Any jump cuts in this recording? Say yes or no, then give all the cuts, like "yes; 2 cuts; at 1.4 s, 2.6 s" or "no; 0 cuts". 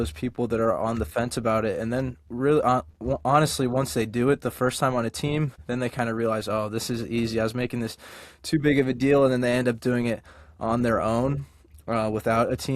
no; 0 cuts